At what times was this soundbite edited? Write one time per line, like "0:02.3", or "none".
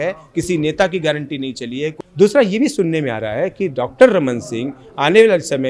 0:01.9